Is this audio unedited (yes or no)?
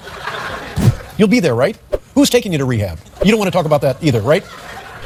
yes